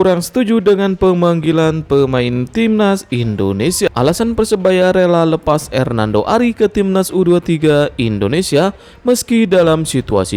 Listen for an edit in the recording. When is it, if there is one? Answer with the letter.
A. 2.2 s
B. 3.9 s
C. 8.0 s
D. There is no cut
B